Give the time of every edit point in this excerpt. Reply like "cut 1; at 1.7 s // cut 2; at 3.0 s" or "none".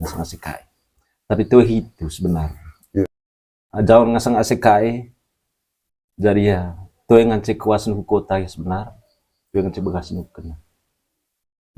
cut 1; at 3.0 s